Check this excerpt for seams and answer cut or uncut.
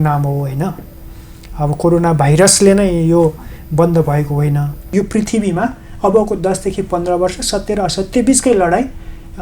cut